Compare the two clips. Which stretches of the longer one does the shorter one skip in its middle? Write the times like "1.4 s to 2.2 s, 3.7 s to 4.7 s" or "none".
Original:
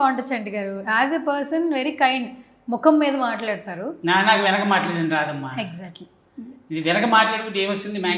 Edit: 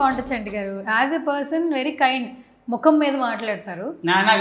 none